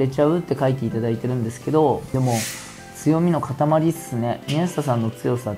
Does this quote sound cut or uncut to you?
cut